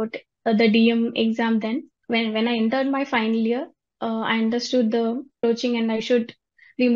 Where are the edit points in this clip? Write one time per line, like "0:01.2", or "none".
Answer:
0:01.9
0:05.4